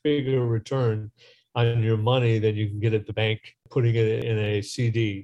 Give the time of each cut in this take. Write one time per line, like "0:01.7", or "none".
0:04.2